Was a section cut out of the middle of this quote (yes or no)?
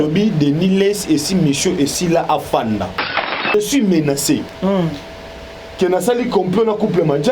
yes